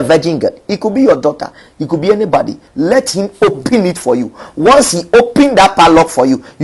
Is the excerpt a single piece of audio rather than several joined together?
no; 1 cut; at 2.6 s

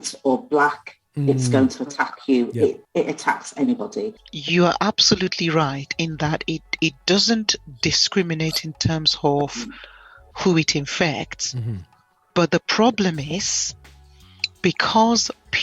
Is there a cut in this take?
yes; 2 cuts; at 2.8 s, 4.3 s

